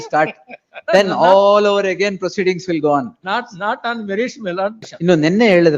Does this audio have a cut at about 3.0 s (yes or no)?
no